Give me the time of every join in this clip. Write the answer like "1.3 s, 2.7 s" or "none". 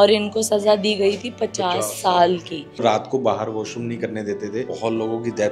2.8 s, 4.7 s